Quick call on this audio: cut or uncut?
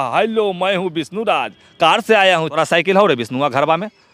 cut